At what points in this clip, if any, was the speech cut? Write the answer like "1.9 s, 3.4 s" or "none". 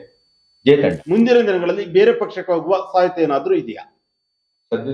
1.0 s